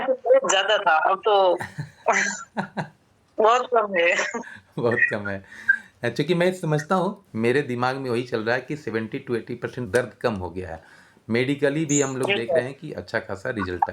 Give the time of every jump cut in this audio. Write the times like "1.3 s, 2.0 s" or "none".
7.2 s, 9.8 s